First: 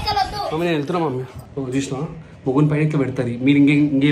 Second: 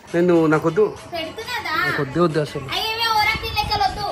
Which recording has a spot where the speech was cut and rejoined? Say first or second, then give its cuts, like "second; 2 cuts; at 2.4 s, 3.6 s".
first; 1 cut; at 1.4 s